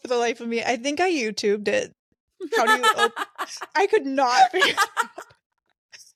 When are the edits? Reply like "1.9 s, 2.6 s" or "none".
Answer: none